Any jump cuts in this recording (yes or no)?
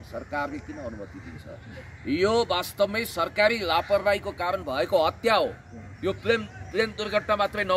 no